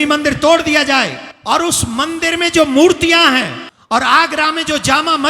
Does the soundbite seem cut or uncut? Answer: cut